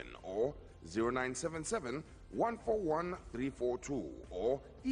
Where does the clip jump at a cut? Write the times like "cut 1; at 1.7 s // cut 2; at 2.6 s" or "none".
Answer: cut 1; at 1.1 s

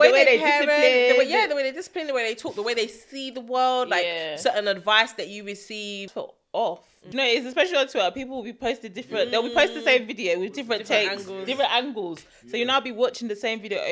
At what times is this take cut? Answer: cut 1; at 6.1 s // cut 2; at 6.9 s

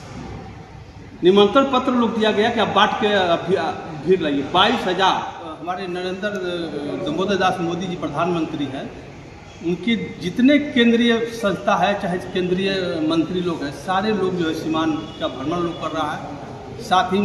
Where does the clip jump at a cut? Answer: cut 1; at 5.6 s

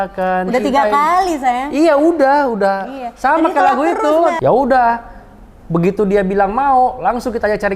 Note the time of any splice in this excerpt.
cut 1; at 4.4 s

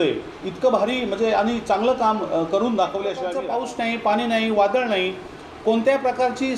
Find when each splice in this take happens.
cut 1; at 3.4 s

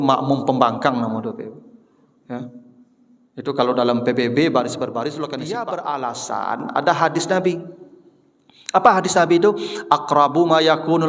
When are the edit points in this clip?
cut 1; at 5.4 s

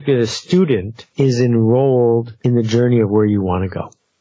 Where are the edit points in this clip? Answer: cut 1; at 1.0 s // cut 2; at 2.3 s

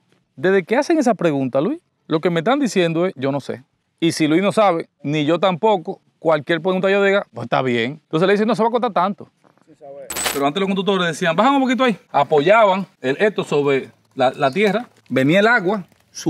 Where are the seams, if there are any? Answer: cut 1; at 4.9 s // cut 2; at 8.0 s // cut 3; at 10.2 s

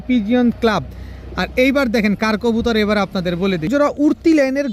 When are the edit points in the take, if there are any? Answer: cut 1; at 3.7 s

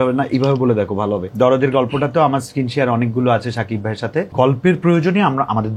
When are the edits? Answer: cut 1; at 1.3 s // cut 2; at 4.3 s

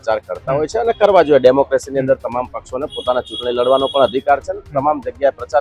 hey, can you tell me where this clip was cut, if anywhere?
none

